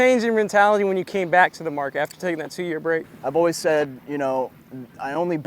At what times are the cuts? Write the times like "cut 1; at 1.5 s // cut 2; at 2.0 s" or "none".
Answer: cut 1; at 3.1 s

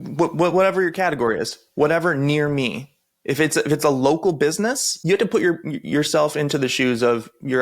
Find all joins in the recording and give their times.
cut 1; at 4.9 s

